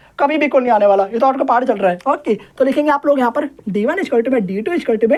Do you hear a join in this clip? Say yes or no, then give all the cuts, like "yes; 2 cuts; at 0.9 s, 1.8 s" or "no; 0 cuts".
no; 0 cuts